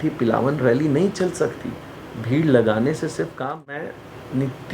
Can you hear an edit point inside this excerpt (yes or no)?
yes